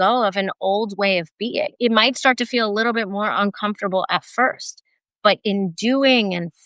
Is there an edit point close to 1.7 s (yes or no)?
yes